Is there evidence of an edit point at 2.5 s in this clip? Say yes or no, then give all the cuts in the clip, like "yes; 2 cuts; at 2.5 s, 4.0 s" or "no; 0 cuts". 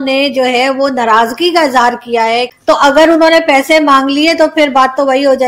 yes; 1 cut; at 2.5 s